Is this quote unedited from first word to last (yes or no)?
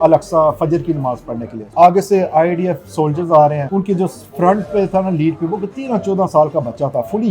no